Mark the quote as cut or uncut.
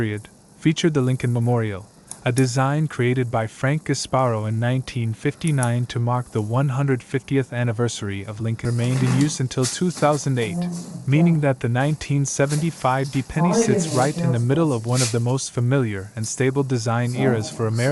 cut